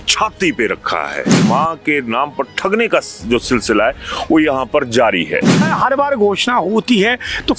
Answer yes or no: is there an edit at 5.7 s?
yes